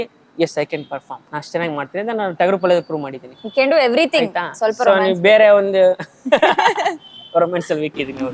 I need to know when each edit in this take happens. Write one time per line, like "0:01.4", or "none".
0:01.2